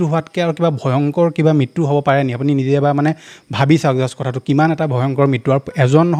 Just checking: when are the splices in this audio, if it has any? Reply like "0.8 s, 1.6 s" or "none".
none

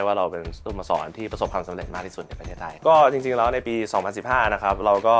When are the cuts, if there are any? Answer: 2.7 s

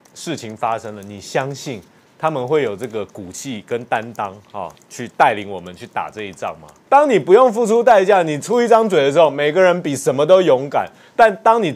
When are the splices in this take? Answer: 6.7 s

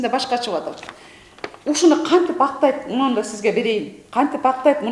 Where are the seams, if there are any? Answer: none

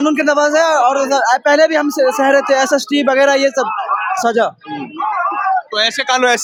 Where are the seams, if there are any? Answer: none

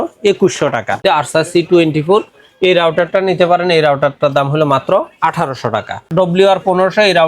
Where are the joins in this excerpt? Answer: 1.0 s, 6.1 s

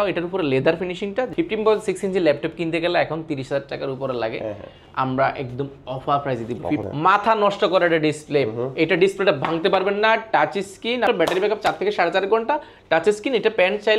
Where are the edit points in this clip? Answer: 1.3 s, 6.8 s, 11.1 s

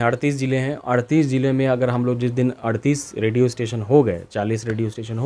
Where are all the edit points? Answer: none

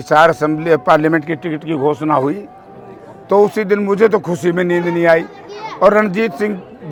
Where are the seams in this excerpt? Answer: none

